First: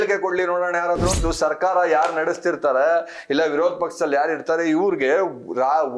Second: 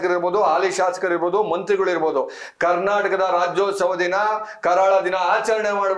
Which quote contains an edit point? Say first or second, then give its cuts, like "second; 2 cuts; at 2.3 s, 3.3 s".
first; 1 cut; at 1.2 s